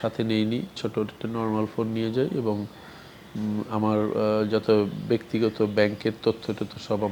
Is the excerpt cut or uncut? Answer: uncut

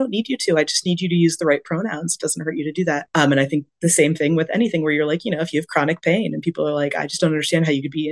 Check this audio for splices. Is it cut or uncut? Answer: uncut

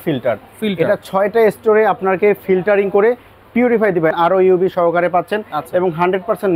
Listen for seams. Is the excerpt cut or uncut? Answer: cut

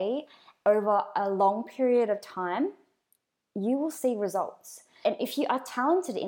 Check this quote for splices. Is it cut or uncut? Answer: cut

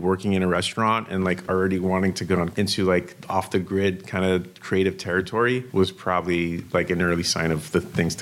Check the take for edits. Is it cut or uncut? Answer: cut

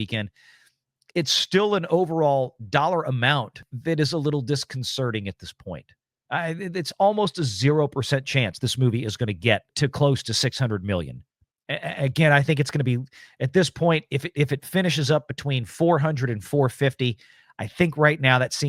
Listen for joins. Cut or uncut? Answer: cut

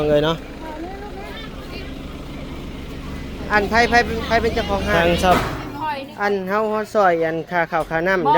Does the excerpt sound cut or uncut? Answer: cut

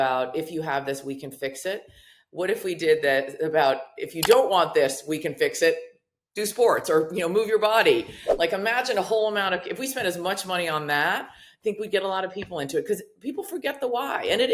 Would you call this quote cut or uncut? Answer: uncut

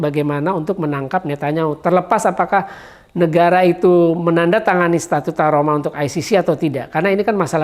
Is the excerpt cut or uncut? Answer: uncut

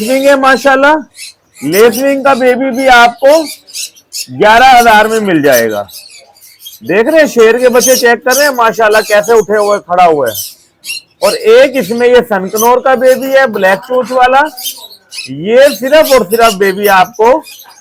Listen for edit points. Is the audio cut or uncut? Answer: uncut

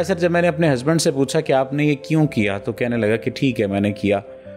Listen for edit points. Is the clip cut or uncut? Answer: uncut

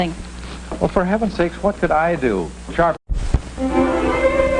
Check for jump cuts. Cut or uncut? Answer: uncut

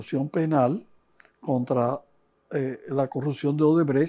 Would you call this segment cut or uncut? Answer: uncut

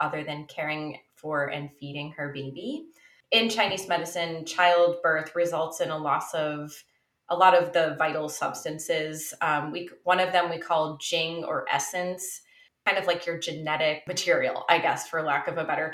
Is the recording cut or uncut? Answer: cut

